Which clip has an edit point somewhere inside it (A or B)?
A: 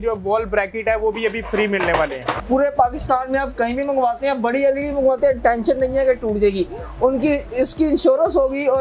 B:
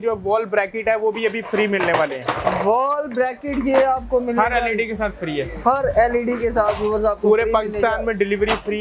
A